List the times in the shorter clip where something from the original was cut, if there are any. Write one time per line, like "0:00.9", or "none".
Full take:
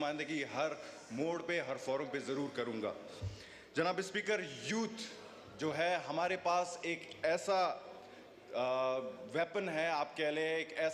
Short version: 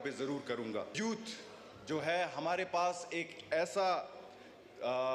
0:00.9